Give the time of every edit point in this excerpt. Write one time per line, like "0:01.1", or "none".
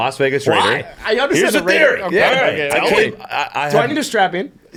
none